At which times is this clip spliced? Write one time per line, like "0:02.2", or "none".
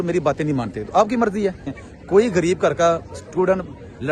0:01.7

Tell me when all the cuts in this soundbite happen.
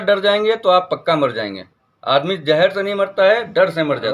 none

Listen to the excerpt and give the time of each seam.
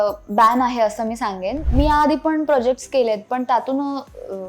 0:01.6

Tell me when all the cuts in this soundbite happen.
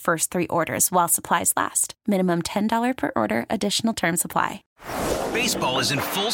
0:04.6

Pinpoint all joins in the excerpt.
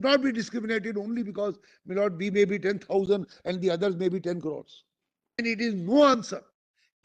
0:05.4

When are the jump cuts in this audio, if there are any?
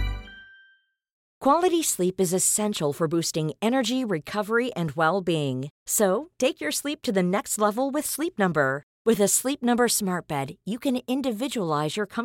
0:01.2

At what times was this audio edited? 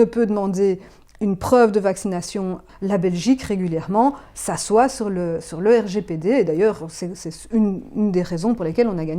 0:02.6

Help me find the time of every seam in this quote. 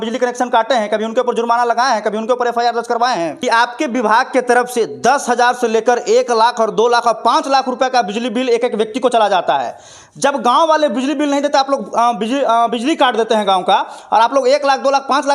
0:03.4

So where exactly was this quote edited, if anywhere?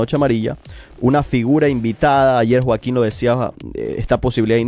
none

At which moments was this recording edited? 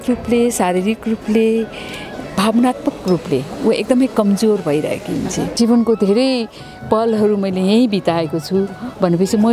0:05.6

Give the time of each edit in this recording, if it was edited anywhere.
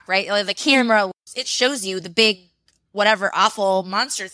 0:01.1

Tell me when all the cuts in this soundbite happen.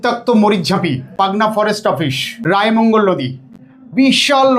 0:01.1
0:02.3

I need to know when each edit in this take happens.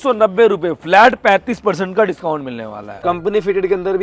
0:03.0

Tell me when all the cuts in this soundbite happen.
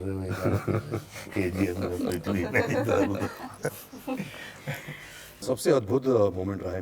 0:05.3

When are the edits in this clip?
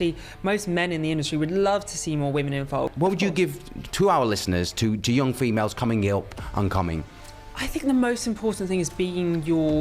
0:02.9

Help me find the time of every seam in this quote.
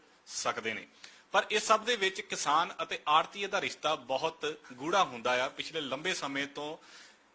0:01.4

